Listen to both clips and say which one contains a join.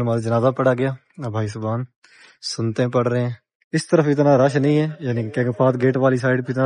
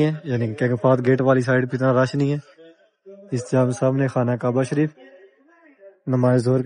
first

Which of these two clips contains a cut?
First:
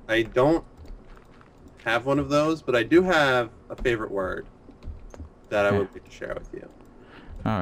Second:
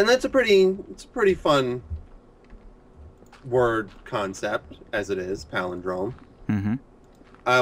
first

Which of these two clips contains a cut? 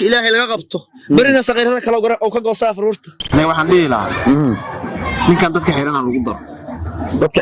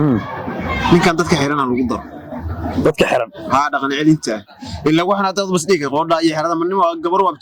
first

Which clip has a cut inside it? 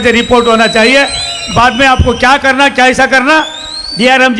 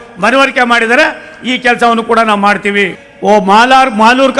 second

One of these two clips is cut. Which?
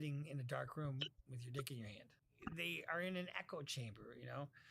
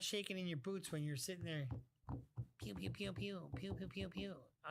first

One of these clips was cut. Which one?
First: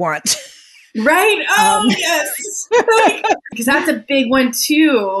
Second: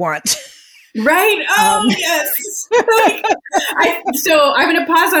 first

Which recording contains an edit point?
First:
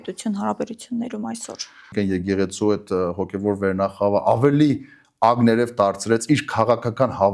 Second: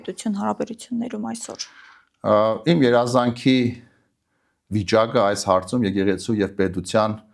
first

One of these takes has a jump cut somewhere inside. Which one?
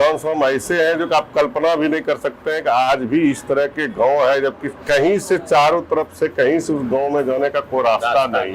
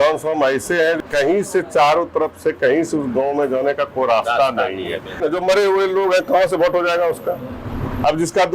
second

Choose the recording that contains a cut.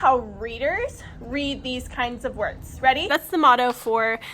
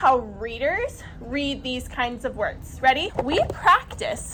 first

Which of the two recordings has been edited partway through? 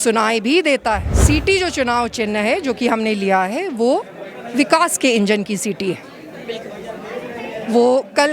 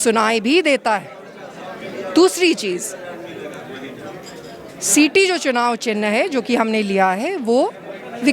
first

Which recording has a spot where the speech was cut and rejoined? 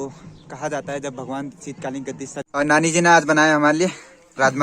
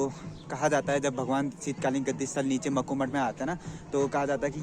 first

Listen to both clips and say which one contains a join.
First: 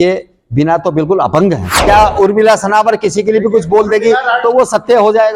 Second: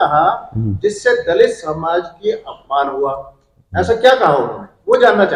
first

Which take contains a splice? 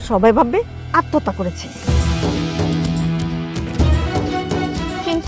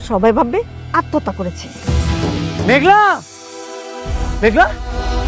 second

